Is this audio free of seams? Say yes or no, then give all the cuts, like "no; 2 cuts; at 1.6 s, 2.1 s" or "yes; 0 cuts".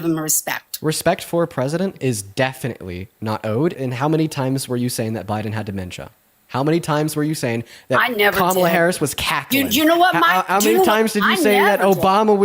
no; 1 cut; at 3.7 s